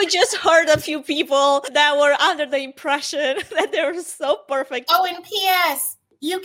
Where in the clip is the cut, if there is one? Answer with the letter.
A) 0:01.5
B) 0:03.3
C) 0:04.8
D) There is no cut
C